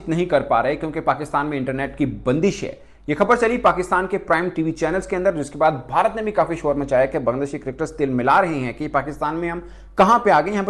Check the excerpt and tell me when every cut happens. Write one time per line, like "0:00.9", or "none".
none